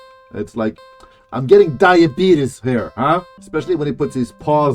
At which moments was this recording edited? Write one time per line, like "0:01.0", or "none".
0:03.4